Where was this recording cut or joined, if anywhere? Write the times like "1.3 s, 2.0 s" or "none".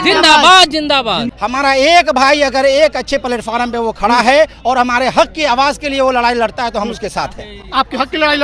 1.3 s